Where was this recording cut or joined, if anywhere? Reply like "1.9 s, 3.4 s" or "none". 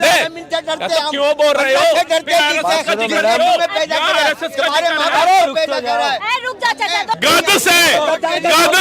none